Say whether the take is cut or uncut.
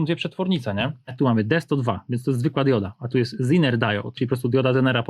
cut